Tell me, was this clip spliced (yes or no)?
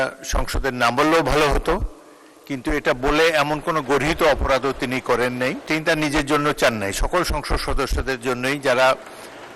yes